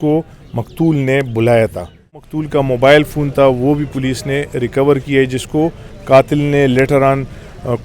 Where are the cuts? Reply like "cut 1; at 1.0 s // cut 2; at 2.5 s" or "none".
cut 1; at 2.3 s